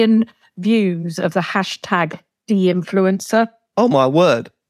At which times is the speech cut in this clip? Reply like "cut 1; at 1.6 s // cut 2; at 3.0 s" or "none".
cut 1; at 2.3 s // cut 2; at 3.6 s